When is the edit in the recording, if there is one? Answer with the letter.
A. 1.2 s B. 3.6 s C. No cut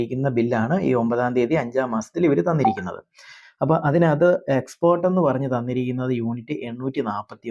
C